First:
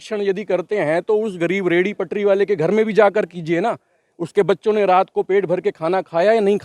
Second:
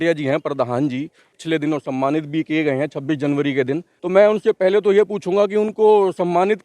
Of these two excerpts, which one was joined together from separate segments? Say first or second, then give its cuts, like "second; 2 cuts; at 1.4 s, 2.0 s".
second; 2 cuts; at 1.3 s, 3.9 s